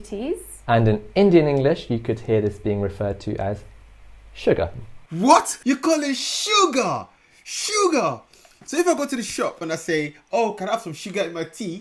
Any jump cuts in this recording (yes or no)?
no